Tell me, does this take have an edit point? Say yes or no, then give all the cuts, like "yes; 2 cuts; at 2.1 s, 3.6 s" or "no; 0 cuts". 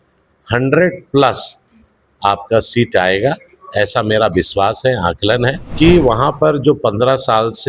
yes; 1 cut; at 5.6 s